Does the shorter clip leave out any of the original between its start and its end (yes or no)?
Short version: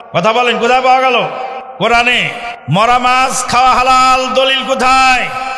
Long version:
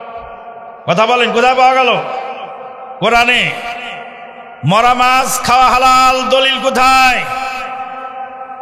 yes